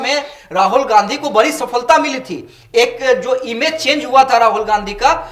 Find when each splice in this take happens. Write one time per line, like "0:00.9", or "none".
none